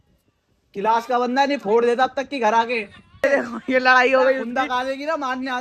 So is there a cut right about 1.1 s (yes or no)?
no